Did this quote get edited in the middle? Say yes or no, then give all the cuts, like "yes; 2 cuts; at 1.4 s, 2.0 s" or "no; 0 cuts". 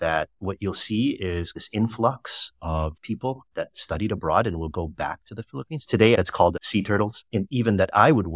yes; 3 cuts; at 1.6 s, 6.2 s, 7.2 s